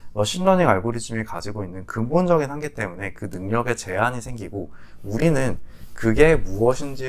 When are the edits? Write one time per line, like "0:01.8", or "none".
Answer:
none